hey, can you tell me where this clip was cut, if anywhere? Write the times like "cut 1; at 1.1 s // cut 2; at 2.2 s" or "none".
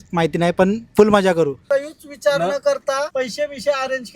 cut 1; at 1.6 s